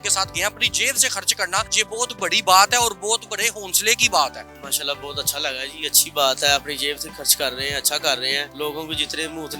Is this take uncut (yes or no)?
no